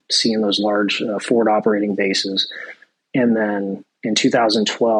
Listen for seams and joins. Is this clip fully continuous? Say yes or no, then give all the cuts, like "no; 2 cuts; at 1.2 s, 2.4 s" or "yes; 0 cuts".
yes; 0 cuts